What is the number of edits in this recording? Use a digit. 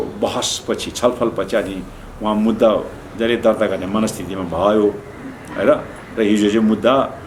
0